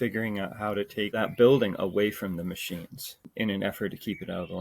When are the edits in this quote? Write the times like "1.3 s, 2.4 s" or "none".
1.2 s, 3.3 s